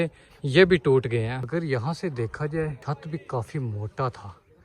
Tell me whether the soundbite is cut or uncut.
cut